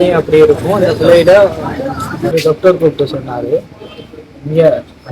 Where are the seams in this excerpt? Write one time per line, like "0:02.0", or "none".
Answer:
0:02.3